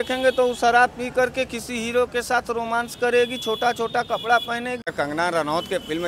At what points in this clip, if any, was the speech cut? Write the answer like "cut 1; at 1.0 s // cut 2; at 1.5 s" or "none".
cut 1; at 4.9 s